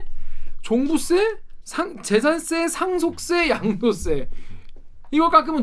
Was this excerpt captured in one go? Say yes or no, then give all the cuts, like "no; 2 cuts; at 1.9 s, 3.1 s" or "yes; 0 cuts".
yes; 0 cuts